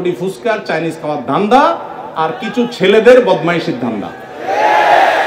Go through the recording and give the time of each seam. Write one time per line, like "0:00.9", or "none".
none